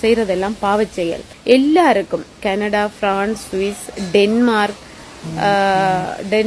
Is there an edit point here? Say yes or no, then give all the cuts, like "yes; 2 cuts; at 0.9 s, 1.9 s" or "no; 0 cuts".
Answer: yes; 1 cut; at 1.3 s